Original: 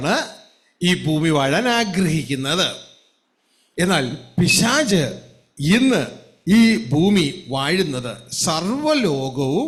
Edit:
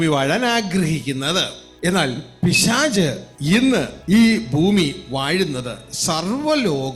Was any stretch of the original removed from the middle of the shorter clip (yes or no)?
yes